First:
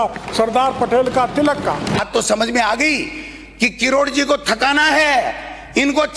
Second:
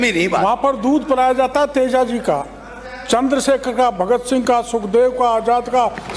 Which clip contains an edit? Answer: first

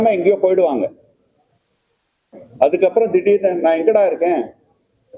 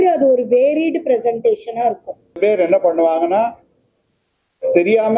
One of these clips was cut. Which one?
second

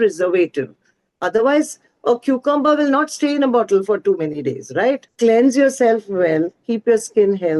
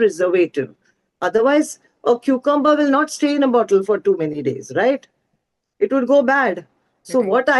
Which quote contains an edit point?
first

